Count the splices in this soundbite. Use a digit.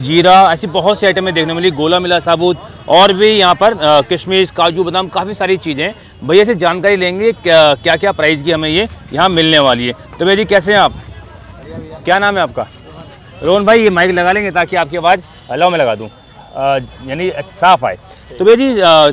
0